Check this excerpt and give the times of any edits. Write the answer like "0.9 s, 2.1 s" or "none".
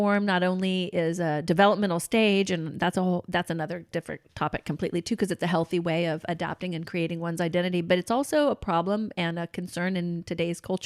none

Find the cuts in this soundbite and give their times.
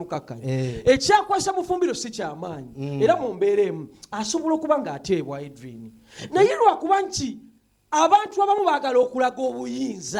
none

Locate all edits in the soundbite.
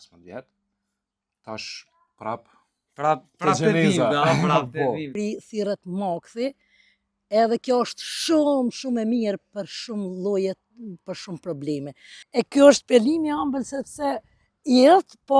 5.1 s, 12.2 s

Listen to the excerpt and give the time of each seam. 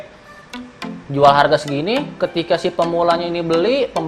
none

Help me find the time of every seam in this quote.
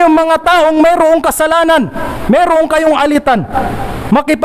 none

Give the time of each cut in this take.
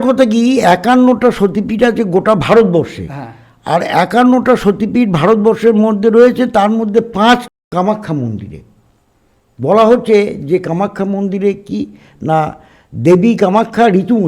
7.6 s

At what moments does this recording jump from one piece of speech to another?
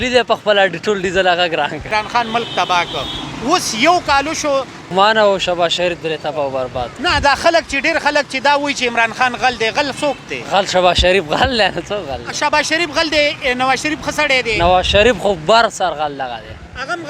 1.8 s, 4.9 s

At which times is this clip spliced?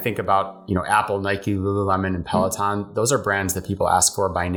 none

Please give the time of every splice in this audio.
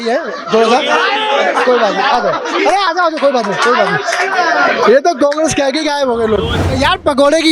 6.6 s

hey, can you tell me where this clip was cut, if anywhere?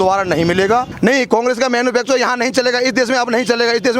0.9 s

